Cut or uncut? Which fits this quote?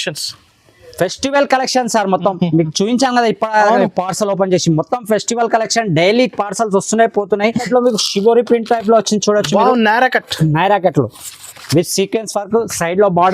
cut